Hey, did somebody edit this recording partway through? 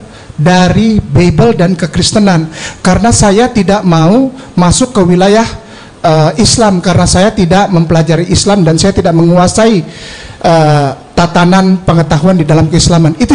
no; 0 cuts

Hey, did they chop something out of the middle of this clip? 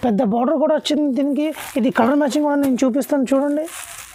no; 0 cuts

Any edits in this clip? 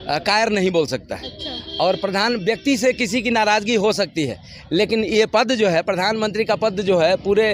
no; 0 cuts

